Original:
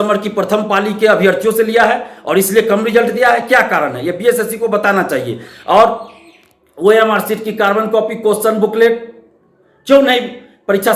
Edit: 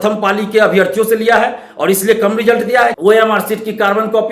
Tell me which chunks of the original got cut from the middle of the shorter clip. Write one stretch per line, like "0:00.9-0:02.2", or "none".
0:03.4-0:06.8